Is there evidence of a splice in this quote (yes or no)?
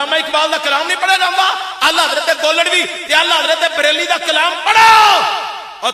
no